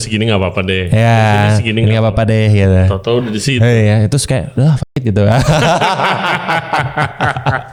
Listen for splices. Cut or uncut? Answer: uncut